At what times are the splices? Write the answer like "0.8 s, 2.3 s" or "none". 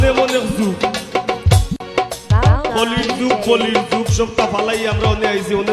1.4 s